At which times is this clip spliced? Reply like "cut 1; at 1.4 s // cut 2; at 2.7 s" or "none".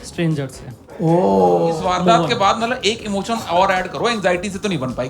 cut 1; at 1.8 s